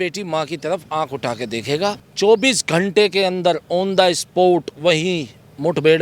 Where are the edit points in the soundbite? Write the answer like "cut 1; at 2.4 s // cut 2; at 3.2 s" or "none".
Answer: cut 1; at 2.1 s

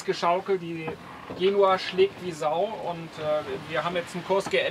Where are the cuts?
none

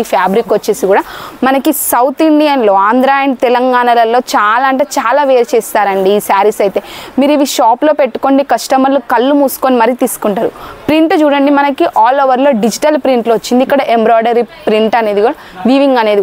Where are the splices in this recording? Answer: none

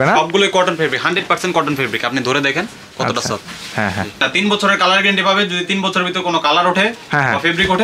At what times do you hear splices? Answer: cut 1; at 4.3 s

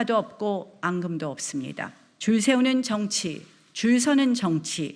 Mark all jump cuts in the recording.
cut 1; at 2.0 s

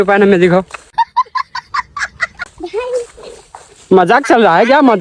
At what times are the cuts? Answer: none

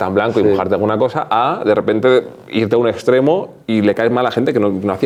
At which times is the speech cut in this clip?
none

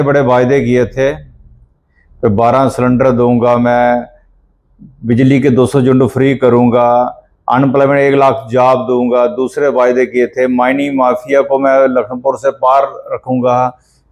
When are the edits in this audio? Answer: none

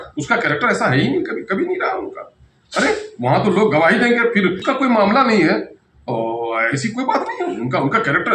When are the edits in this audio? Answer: cut 1; at 4.6 s

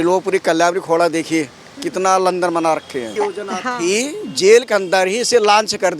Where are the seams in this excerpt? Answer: cut 1; at 3.1 s

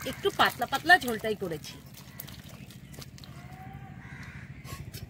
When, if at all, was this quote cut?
none

